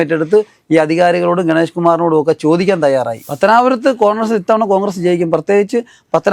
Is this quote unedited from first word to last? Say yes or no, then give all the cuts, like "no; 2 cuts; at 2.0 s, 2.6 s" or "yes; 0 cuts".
no; 1 cut; at 3.2 s